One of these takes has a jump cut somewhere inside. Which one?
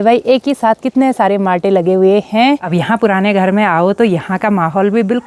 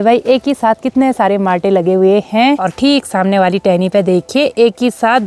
first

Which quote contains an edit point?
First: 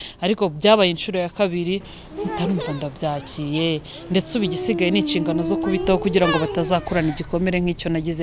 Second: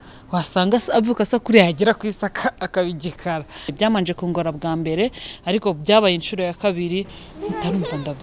second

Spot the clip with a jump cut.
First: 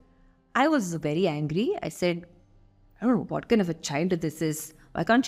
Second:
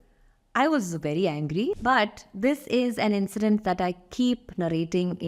second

